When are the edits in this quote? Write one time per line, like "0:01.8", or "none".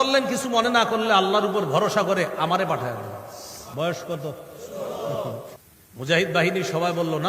0:03.6
0:05.5